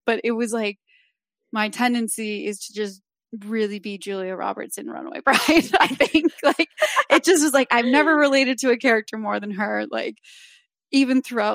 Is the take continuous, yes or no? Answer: yes